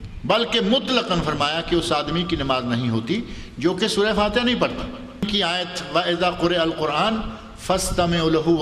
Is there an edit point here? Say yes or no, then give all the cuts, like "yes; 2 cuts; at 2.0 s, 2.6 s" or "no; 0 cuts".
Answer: yes; 1 cut; at 5.2 s